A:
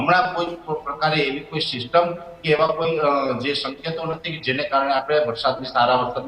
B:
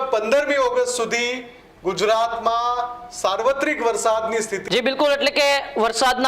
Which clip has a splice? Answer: B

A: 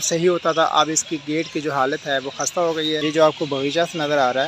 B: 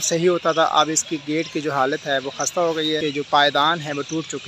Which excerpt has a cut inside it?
A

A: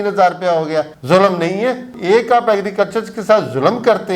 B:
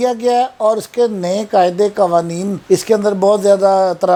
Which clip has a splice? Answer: A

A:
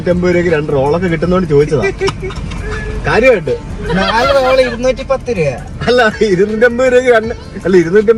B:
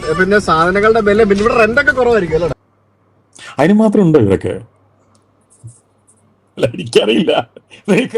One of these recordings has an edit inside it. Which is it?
B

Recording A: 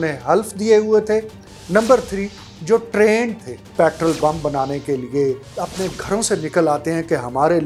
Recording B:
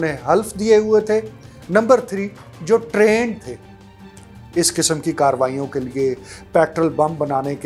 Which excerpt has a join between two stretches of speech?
A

